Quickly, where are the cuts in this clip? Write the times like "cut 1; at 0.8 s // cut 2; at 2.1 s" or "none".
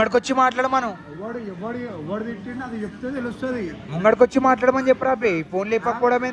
none